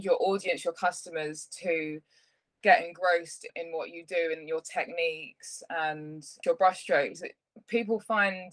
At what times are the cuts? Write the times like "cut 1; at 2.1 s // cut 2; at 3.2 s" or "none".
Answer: cut 1; at 6.4 s